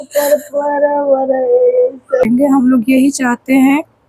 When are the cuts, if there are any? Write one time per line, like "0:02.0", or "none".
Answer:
0:02.3

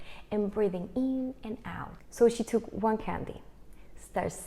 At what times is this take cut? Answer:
0:02.0

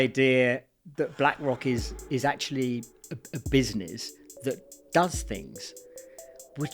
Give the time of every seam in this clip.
none

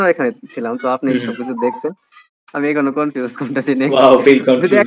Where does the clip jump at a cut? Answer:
0:02.1

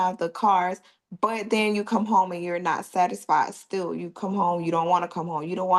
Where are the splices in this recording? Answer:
none

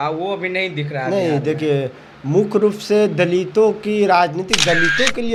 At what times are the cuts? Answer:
none

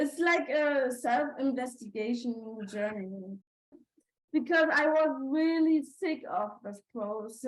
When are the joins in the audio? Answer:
0:03.4

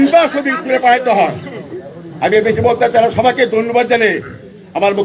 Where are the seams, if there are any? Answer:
none

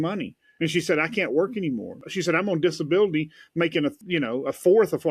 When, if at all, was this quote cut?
0:02.0
0:04.0

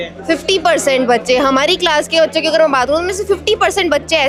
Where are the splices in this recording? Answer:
none

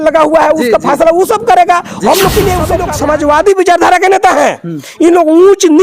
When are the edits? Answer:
0:02.9

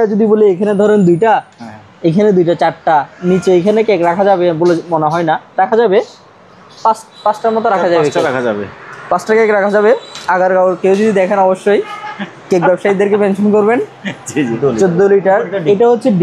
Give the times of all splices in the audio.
0:14.5

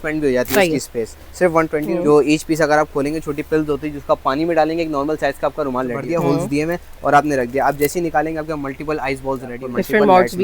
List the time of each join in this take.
0:01.9
0:06.0
0:09.6

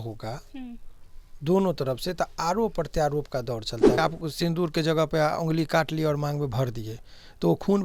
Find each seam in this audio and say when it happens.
0:04.0

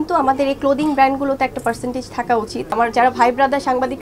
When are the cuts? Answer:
0:02.7

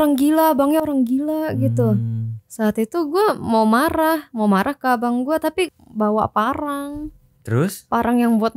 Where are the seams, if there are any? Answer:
0:05.8

